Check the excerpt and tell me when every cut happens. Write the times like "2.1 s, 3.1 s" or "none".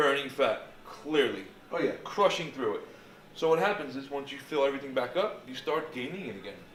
none